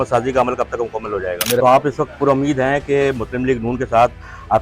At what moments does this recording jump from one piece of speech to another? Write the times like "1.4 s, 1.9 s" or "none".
1.6 s